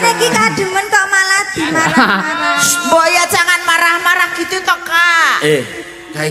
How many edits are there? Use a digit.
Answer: 0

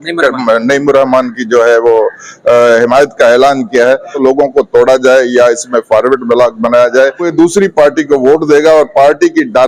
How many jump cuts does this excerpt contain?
2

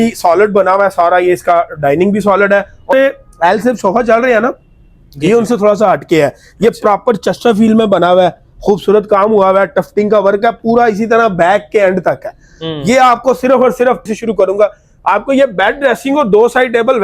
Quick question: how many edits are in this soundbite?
2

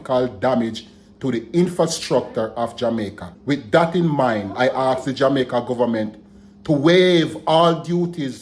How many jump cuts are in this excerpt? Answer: 1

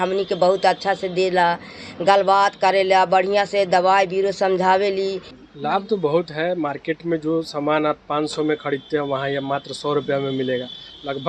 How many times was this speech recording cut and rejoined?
1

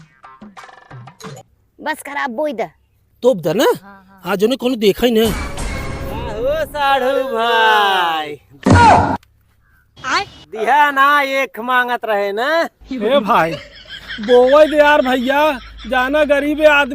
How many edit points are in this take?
1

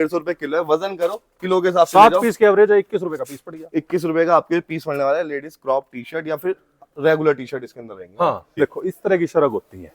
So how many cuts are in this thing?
1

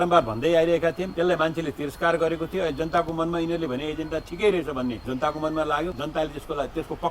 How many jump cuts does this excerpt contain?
3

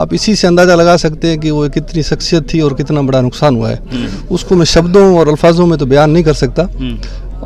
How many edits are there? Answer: 0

